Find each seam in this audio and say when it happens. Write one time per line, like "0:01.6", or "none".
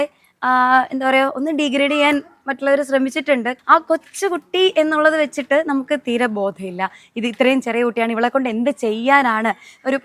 0:03.6